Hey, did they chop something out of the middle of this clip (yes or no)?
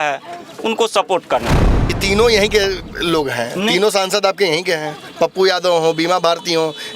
yes